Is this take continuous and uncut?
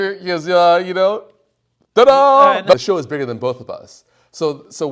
no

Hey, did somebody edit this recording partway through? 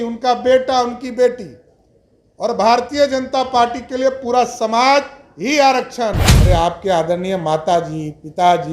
yes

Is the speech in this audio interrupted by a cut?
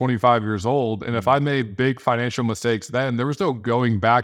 no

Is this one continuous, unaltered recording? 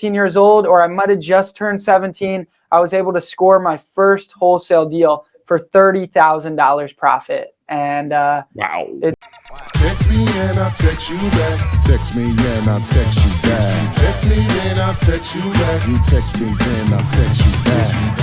no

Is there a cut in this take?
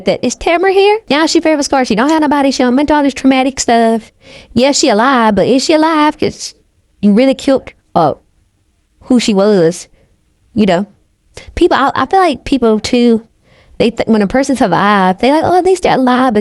yes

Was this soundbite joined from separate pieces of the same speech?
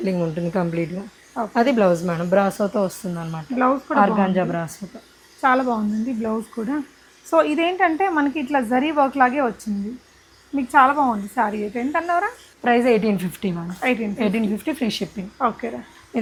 no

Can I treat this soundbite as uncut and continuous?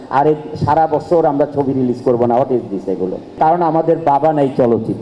no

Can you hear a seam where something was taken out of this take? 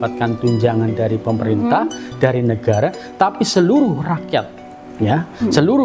no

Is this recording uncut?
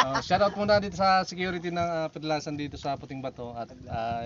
yes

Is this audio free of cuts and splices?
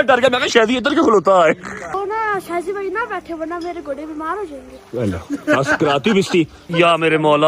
no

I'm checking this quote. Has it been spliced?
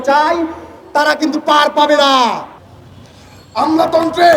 yes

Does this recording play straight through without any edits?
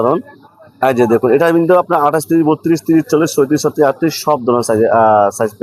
yes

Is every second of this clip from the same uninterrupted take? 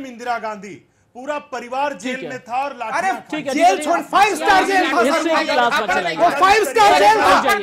yes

